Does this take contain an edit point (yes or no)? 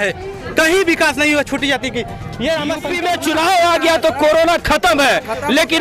yes